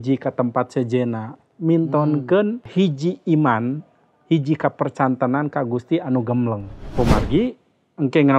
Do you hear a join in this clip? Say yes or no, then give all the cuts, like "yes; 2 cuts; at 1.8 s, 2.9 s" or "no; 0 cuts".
yes; 2 cuts; at 2.7 s, 6.8 s